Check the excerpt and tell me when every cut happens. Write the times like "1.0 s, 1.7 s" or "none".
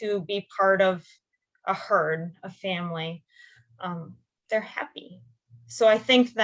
none